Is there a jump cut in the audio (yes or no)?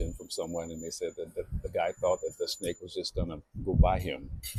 no